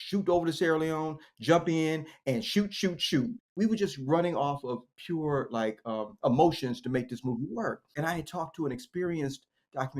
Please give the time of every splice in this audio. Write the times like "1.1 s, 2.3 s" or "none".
3.4 s, 7.8 s